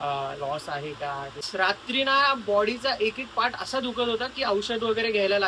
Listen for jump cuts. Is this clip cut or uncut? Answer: cut